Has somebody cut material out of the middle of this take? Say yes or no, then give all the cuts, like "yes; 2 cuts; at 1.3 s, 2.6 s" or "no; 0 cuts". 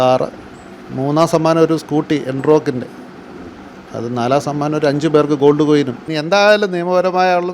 yes; 1 cut; at 6.0 s